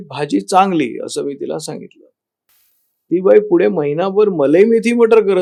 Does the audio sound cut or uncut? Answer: uncut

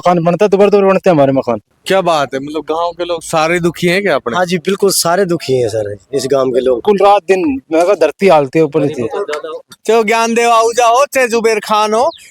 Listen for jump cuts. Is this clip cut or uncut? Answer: cut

